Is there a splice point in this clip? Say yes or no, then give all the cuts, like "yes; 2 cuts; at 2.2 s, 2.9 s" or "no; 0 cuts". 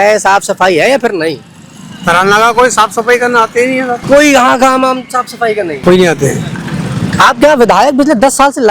yes; 2 cuts; at 4.0 s, 5.8 s